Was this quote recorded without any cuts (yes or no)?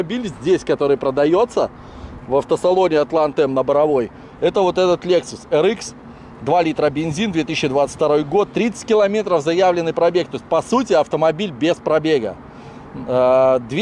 yes